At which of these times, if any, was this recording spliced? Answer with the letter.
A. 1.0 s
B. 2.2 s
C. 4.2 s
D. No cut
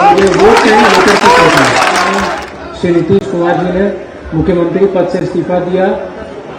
B